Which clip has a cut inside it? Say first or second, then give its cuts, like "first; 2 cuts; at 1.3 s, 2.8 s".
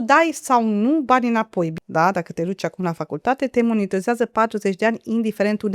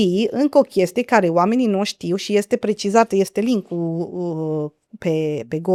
first; 1 cut; at 1.8 s